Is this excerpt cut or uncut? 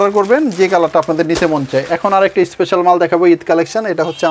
uncut